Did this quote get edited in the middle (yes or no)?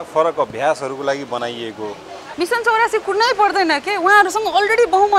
yes